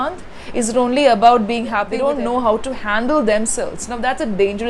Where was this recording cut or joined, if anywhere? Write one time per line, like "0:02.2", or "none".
0:01.9